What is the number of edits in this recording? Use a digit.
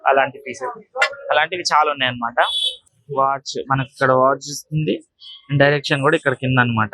1